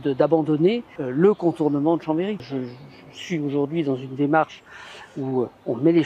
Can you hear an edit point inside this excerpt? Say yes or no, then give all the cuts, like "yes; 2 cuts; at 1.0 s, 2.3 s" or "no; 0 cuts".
yes; 2 cuts; at 1.0 s, 2.4 s